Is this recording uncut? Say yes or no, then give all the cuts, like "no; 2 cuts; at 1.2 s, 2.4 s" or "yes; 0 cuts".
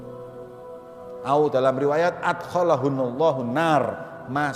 no; 1 cut; at 1.3 s